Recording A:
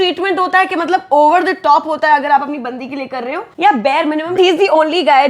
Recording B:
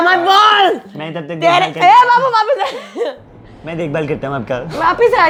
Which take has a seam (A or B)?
A